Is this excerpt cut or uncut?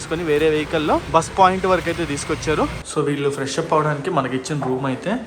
cut